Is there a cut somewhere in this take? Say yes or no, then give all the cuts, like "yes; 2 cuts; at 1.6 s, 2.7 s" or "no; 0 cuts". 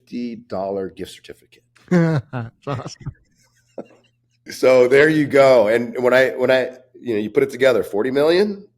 yes; 1 cut; at 4.4 s